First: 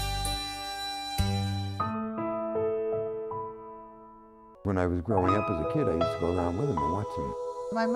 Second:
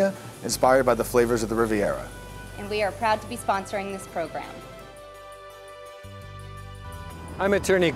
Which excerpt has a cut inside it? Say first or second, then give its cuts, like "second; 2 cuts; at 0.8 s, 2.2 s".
second; 1 cut; at 6.9 s